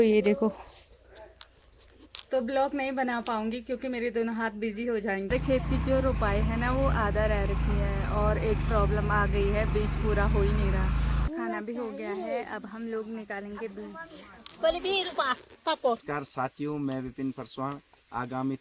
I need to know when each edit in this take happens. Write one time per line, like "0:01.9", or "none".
0:05.2
0:11.3
0:16.0